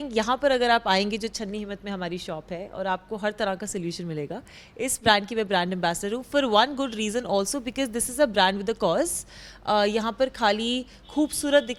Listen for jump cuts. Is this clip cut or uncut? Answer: uncut